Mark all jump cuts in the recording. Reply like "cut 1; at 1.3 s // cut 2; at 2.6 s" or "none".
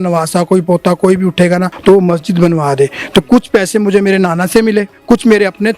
cut 1; at 1.7 s // cut 2; at 4.9 s

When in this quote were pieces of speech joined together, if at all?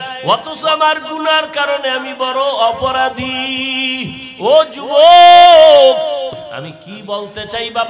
cut 1; at 6.3 s

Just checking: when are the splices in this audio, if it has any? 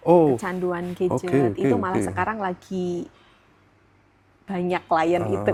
none

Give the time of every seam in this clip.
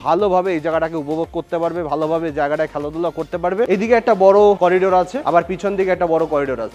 cut 1; at 3.7 s

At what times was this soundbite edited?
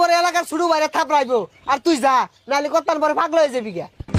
none

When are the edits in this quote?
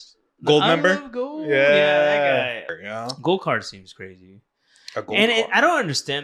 cut 1; at 2.6 s

